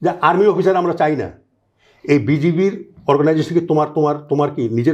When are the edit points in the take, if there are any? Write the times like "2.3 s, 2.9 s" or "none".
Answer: none